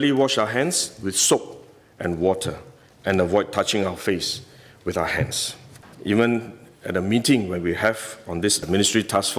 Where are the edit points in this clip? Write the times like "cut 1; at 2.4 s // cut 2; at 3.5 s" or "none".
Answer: cut 1; at 5.9 s